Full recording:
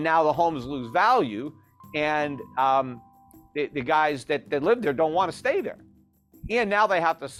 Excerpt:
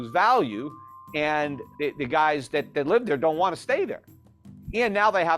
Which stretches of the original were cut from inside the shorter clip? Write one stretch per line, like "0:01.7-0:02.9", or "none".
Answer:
0:02.4-0:03.4

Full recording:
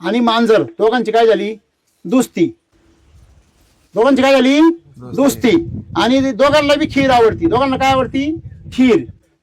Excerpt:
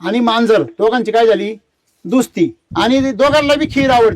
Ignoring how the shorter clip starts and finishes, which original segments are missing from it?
0:02.6-0:05.8

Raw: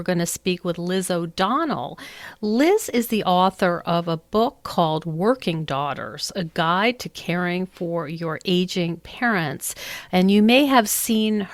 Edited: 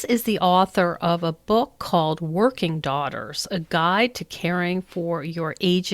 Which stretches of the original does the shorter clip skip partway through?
none

